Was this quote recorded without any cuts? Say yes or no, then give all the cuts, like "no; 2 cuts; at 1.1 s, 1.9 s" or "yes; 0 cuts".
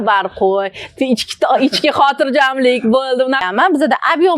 no; 1 cut; at 3.4 s